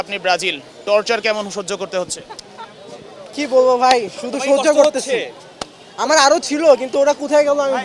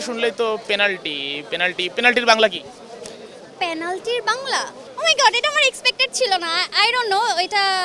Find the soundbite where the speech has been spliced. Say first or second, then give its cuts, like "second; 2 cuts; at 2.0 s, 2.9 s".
second; 1 cut; at 4.8 s